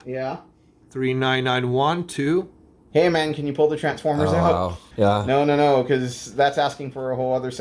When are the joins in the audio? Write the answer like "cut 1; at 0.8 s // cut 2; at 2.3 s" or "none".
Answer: cut 1; at 2.8 s // cut 2; at 4.8 s